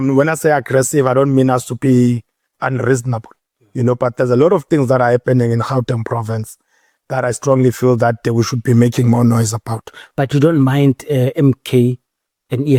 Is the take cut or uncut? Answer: uncut